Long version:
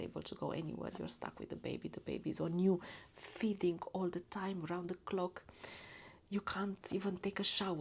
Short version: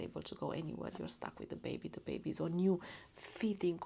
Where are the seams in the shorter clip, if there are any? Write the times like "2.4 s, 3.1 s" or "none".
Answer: none